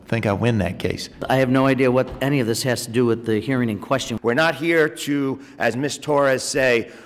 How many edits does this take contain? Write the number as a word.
two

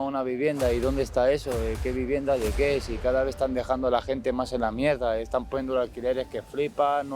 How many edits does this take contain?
zero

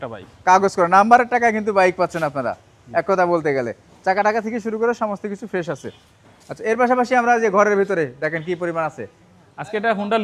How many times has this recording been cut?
zero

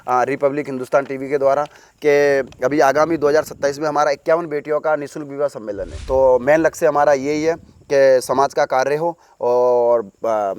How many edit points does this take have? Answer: one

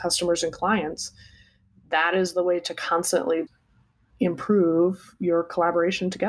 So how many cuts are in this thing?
one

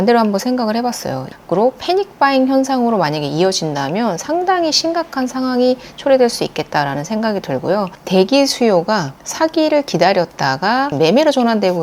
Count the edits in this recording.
three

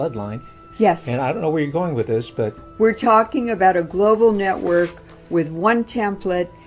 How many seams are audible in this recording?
zero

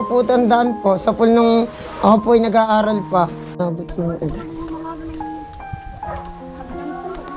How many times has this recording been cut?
one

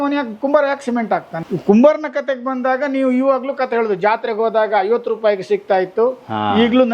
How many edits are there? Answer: one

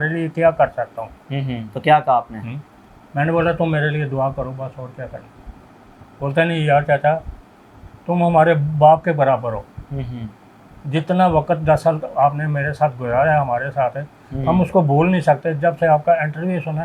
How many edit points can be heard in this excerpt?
zero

